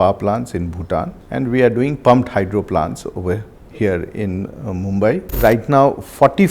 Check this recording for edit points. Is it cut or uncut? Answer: cut